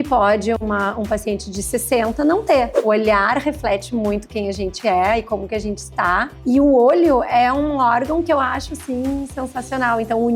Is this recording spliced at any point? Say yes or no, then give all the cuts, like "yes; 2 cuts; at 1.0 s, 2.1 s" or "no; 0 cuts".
yes; 2 cuts; at 2.8 s, 6.3 s